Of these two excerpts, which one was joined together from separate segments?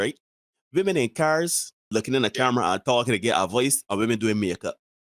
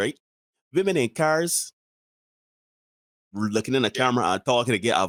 first; 1 cut; at 1.9 s

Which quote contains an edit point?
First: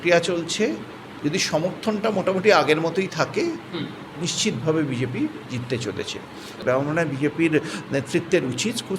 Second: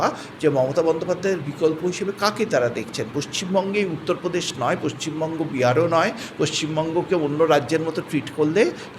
first; 1 cut; at 6.5 s

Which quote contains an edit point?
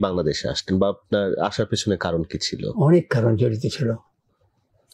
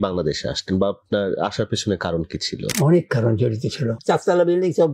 second; 1 cut; at 4.0 s

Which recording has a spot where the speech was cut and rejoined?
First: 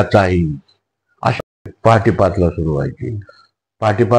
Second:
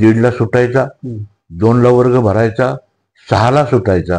first; 1 cut; at 1.5 s

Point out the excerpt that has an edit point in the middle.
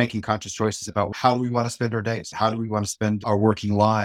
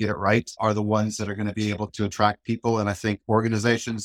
first; 2 cuts; at 1.1 s, 2.3 s

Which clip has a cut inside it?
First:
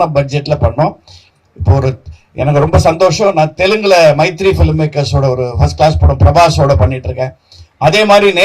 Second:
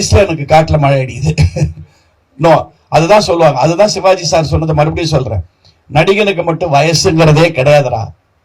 first; 1 cut; at 1.3 s

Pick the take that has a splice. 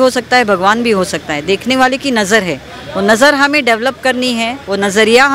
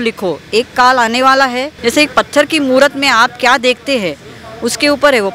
second; 1 cut; at 1.7 s

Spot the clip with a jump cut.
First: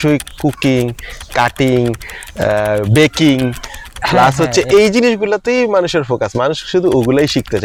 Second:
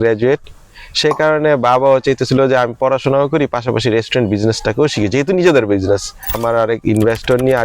second; 1 cut; at 6.3 s

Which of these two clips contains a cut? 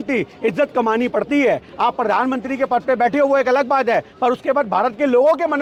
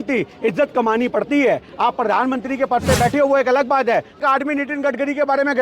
second; 1 cut; at 4.2 s

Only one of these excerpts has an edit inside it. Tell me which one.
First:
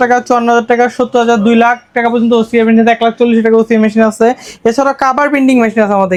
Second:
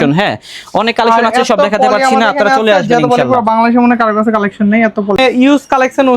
second; 1 cut; at 5.2 s

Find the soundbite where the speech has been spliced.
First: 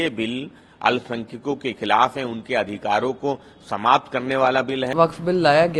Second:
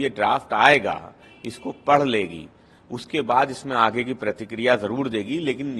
first; 1 cut; at 4.9 s

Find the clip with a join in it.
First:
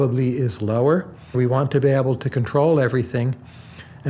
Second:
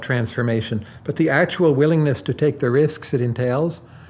first; 1 cut; at 1.3 s

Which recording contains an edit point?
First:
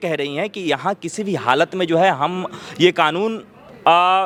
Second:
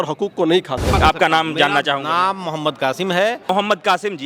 second; 2 cuts; at 0.9 s, 3.5 s

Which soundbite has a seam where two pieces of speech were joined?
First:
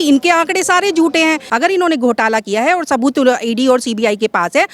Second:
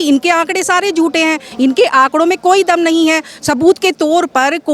first; 1 cut; at 1.4 s

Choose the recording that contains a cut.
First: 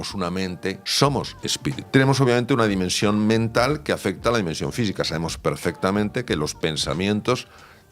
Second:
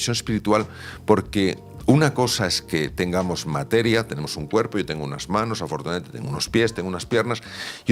first; 2 cuts; at 0.8 s, 1.8 s

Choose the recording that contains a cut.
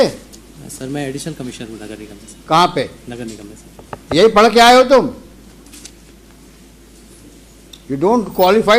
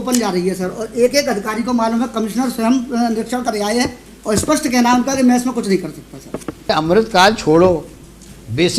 second; 1 cut; at 6.7 s

